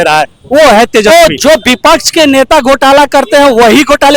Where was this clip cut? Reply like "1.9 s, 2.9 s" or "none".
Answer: 1.1 s